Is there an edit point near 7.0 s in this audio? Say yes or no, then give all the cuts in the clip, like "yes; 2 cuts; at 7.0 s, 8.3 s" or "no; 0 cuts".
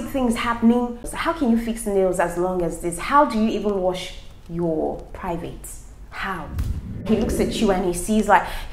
yes; 2 cuts; at 1.1 s, 7.0 s